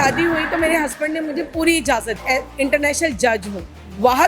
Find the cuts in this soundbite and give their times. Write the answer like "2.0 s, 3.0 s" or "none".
2.2 s